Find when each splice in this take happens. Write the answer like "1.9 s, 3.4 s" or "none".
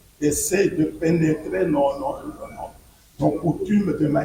none